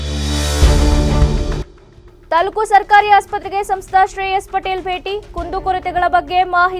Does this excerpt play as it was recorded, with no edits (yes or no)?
no